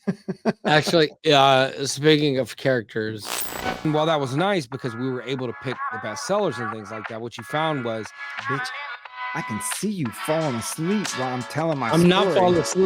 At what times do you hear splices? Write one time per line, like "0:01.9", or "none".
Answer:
0:03.9